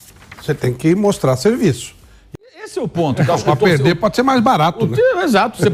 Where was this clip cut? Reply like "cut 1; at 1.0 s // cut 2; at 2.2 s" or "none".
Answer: cut 1; at 2.7 s